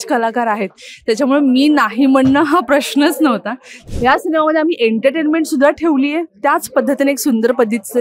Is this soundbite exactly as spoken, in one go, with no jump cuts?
no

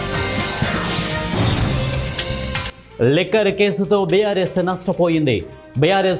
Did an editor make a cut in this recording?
yes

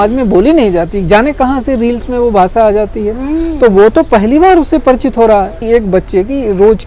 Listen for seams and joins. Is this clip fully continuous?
no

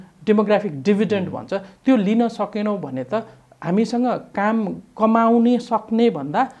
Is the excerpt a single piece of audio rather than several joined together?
yes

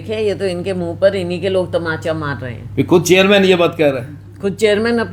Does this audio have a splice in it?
no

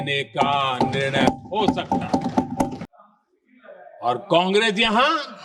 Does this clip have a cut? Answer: yes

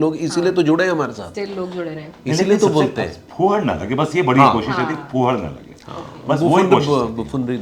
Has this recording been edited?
no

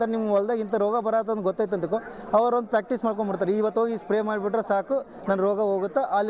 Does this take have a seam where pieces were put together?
no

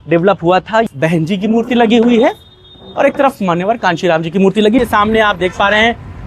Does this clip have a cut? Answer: yes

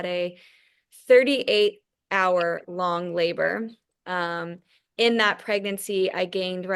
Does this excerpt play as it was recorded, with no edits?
yes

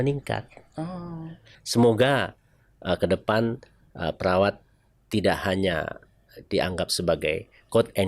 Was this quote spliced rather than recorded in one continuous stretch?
yes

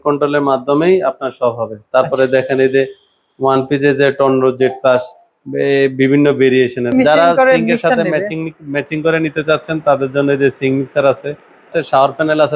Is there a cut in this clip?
yes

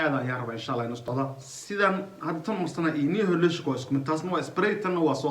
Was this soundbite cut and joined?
yes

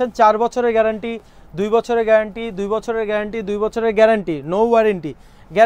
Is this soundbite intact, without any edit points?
yes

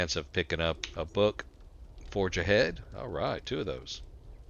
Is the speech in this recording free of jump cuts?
no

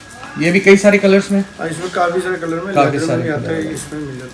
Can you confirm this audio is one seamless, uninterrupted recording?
yes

